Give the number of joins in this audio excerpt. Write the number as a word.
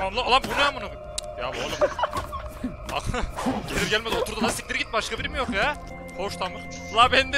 one